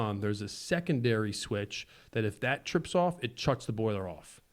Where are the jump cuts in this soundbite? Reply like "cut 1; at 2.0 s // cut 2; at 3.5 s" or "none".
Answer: none